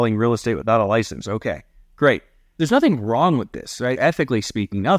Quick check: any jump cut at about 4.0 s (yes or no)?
yes